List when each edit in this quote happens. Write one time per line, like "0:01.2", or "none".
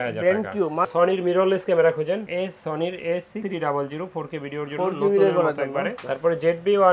0:00.9
0:06.0